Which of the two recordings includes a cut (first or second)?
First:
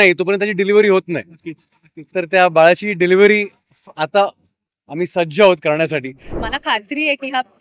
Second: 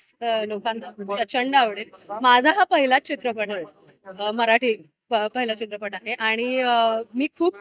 first